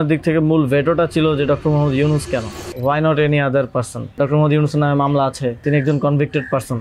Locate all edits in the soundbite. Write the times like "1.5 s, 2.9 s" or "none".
2.6 s, 4.2 s, 5.6 s